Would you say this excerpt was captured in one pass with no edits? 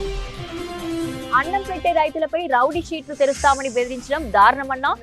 no; 1 cut; at 1.3 s

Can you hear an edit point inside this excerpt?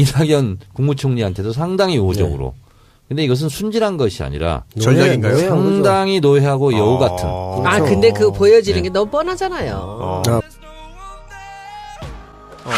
yes; 1 cut; at 10.4 s

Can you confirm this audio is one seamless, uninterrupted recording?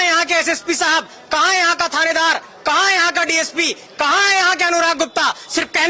yes; 0 cuts

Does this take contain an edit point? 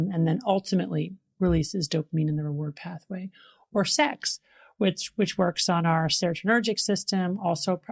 no; 0 cuts

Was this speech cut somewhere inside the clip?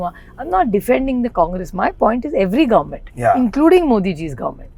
no; 0 cuts

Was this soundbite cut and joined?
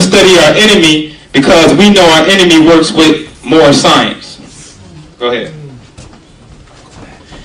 yes; 1 cut; at 6.5 s

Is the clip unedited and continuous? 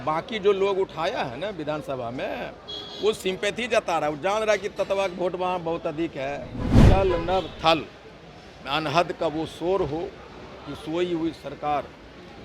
no; 1 cut; at 6.8 s

